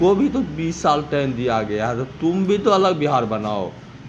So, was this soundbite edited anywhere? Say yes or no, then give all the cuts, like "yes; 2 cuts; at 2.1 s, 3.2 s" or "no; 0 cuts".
no; 0 cuts